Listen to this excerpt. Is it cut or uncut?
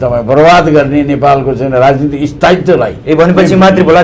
cut